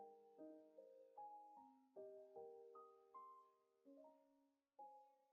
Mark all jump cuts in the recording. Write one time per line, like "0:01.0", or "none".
none